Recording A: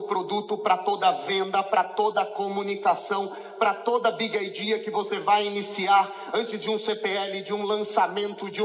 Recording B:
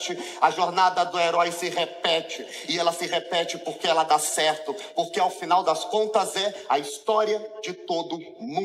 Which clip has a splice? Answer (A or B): B